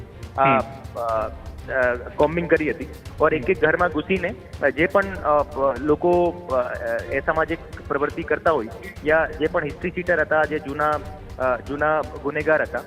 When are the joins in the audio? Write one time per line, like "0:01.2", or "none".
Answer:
none